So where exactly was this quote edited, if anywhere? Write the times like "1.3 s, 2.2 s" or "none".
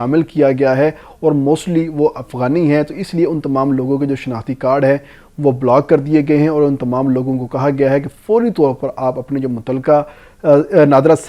none